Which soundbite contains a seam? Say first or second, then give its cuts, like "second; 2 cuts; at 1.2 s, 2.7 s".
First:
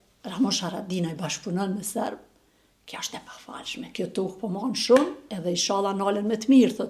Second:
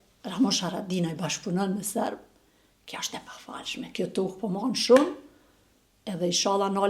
first; 1 cut; at 5.3 s